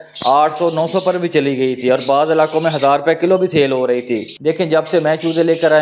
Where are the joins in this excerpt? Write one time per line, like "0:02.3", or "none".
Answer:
0:04.3

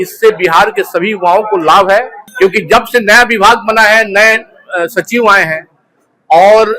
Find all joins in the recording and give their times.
0:02.2

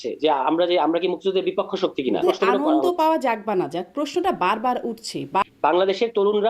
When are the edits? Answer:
0:02.2
0:05.4

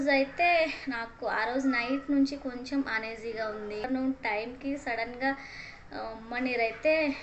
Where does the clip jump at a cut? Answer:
0:03.8

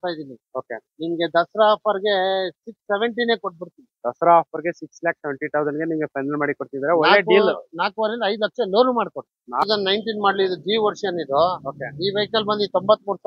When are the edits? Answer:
0:09.6

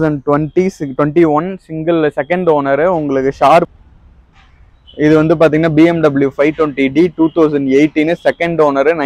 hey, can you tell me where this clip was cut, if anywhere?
0:03.7

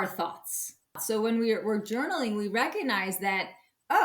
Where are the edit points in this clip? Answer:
0:01.0

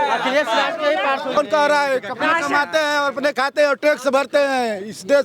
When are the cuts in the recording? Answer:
0:01.4

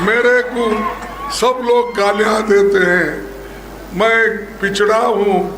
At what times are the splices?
none

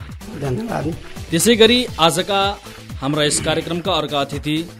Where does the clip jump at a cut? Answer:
0:01.1

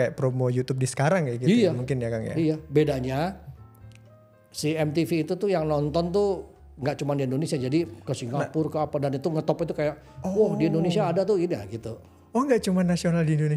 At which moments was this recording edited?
none

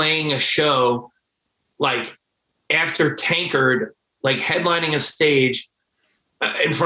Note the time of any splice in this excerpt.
none

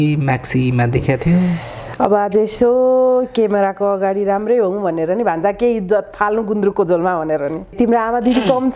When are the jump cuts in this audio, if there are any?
0:07.7

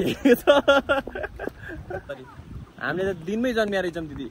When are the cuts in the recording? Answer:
0:02.1

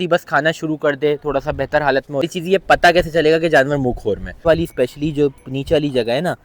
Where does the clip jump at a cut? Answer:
0:02.2
0:04.3

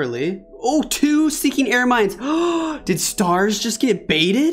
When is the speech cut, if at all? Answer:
none

